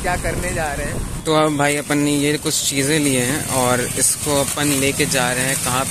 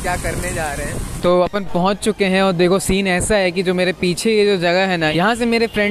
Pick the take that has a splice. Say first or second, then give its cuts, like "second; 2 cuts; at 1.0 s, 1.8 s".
first; 1 cut; at 1.1 s